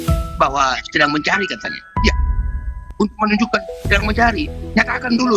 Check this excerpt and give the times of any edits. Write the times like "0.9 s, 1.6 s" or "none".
none